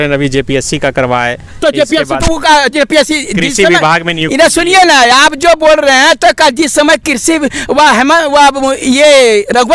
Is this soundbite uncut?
yes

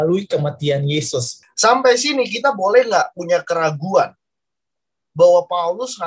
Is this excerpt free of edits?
no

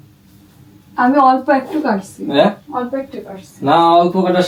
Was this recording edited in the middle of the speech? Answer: no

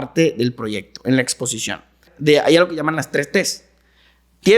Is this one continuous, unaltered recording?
no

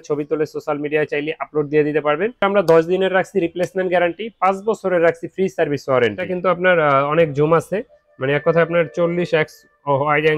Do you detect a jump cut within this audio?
yes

